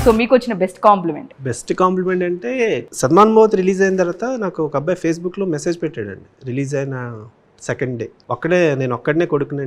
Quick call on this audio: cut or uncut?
cut